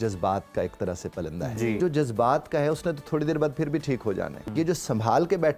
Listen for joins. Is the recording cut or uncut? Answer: cut